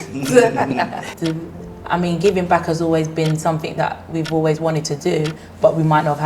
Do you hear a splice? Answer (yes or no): yes